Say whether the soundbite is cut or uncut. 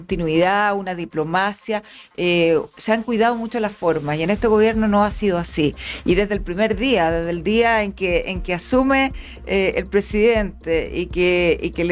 uncut